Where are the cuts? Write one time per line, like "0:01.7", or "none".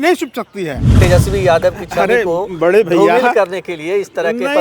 0:00.9